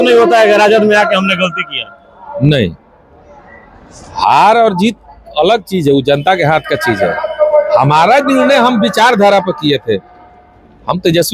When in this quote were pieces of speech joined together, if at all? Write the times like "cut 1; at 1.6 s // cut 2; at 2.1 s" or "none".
none